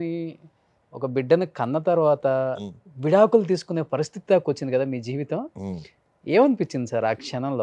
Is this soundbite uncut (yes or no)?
yes